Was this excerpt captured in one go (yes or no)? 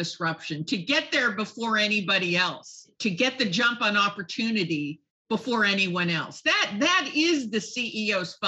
no